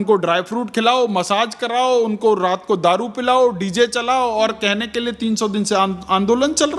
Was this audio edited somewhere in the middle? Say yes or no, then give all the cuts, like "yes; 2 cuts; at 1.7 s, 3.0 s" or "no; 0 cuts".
no; 0 cuts